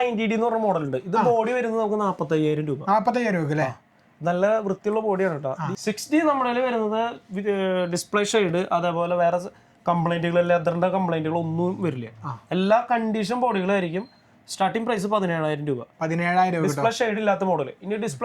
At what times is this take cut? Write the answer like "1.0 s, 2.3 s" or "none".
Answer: 5.7 s